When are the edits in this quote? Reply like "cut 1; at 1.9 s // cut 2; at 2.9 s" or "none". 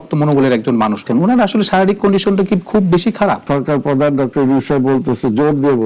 cut 1; at 1.1 s // cut 2; at 3.4 s